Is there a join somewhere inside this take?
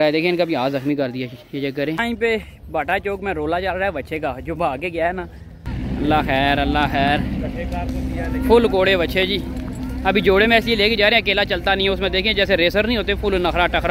yes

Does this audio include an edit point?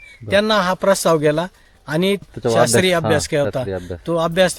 yes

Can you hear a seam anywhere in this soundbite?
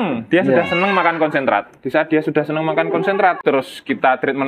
yes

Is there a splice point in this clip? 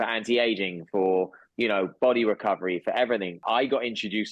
yes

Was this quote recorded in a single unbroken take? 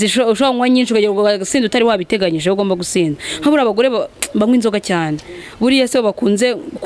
yes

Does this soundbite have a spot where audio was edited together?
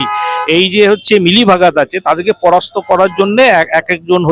no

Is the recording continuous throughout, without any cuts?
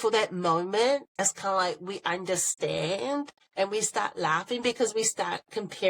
no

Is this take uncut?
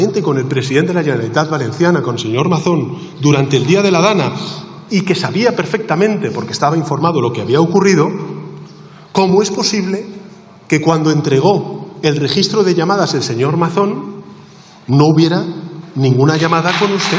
yes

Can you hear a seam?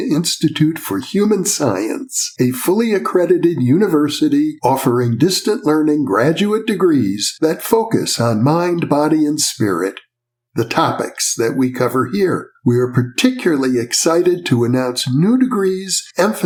no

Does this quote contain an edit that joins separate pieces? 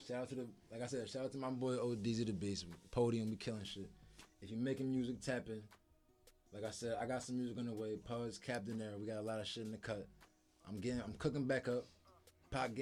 no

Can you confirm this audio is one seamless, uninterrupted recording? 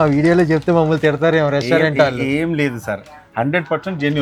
yes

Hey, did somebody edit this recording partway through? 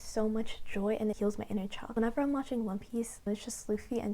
yes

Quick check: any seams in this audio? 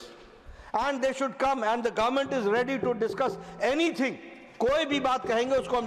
no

